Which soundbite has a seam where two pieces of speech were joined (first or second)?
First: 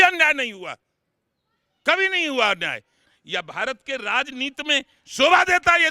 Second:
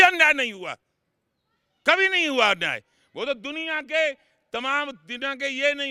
first